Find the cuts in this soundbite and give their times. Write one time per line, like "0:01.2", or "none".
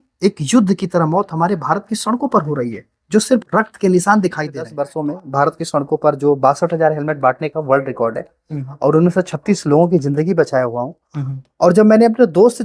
0:04.8